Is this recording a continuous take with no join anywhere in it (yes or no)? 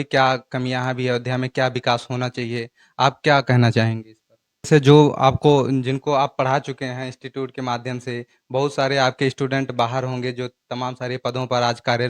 no